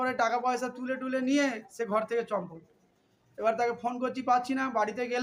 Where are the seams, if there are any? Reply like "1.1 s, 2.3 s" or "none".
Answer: none